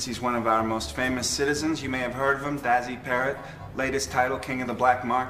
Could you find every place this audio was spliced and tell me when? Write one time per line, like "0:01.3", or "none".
0:03.9